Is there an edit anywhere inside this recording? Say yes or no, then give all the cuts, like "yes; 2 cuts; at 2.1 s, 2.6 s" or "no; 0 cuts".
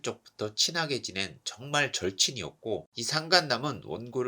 yes; 1 cut; at 2.8 s